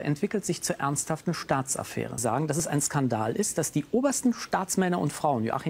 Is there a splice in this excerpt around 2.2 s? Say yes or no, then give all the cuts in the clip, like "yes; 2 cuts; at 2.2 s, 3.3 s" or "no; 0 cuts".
yes; 1 cut; at 2.2 s